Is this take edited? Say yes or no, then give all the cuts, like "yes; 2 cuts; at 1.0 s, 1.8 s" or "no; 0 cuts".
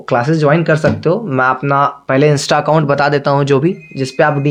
no; 0 cuts